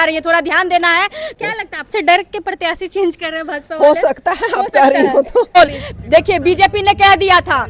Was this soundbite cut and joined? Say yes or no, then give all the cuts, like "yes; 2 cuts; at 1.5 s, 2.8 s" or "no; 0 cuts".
yes; 2 cuts; at 1.3 s, 5.6 s